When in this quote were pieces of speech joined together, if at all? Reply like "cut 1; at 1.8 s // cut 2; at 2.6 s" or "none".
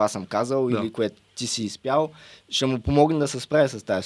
none